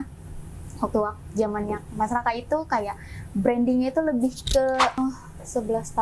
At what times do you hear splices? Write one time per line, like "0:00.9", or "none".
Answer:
0:05.0

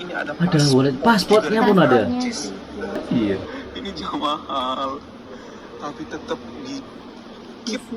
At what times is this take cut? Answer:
0:03.0

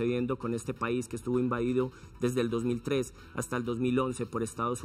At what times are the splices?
none

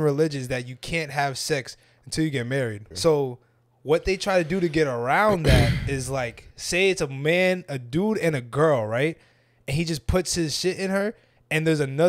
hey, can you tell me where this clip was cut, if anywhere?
0:02.8
0:06.5

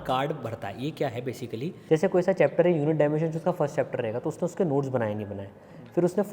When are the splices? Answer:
0:01.8

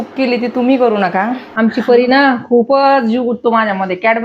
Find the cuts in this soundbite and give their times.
0:01.4

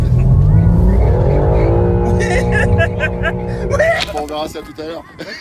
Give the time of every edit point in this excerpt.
none

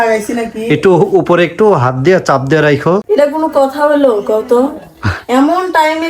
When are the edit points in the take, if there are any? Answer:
0:03.0

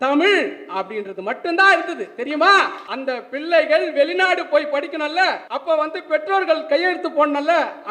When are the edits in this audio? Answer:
0:02.8
0:05.5

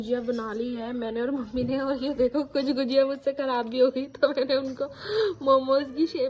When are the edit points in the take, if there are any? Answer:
none

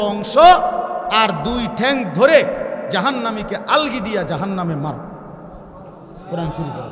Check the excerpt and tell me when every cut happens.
none

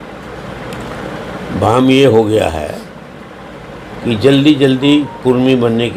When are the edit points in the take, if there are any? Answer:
none

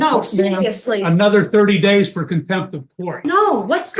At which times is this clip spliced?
0:03.1

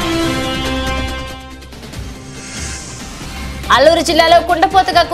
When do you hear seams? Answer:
0:01.2
0:03.0

